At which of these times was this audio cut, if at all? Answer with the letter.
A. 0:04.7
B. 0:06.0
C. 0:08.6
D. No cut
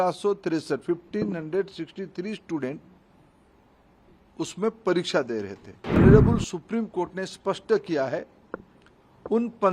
B